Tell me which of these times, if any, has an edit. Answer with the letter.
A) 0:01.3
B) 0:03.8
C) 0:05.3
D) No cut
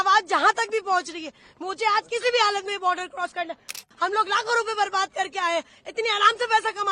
B